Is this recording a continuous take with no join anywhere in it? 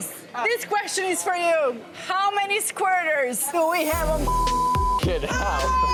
yes; 0 cuts

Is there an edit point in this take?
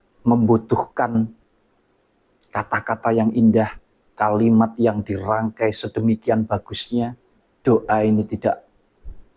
no; 0 cuts

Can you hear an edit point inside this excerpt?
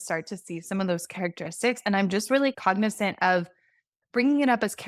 no; 0 cuts

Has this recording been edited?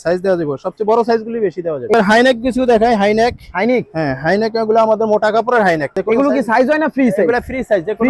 yes; 2 cuts; at 1.9 s, 5.9 s

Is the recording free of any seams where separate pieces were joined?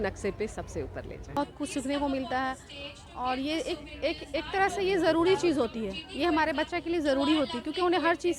no; 1 cut; at 1.5 s

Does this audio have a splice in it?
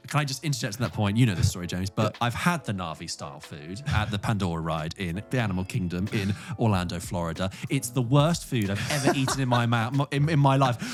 no; 0 cuts

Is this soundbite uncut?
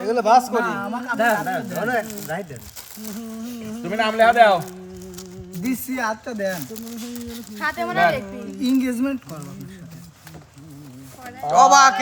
yes; 0 cuts

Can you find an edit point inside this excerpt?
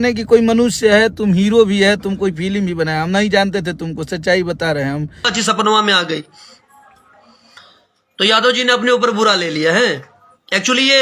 yes; 1 cut; at 5.3 s

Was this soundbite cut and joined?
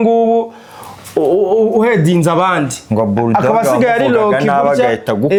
no; 0 cuts

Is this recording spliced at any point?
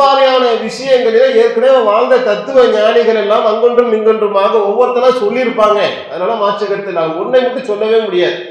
no; 0 cuts

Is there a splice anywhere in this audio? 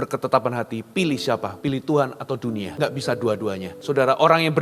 yes; 3 cuts; at 1.5 s, 2.7 s, 3.7 s

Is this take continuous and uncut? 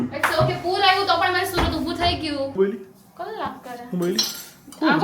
no; 1 cut; at 2.5 s

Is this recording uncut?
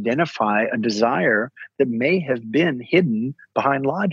yes; 0 cuts

